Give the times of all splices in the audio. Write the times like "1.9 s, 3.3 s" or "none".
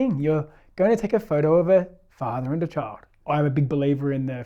3.1 s